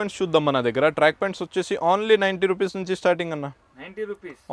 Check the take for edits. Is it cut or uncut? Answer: uncut